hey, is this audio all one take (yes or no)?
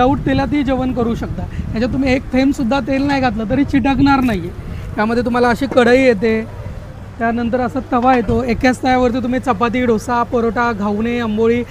yes